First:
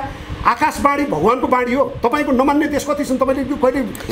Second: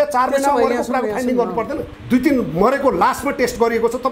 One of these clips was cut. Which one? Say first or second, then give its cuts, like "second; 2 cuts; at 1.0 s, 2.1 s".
second; 1 cut; at 1.9 s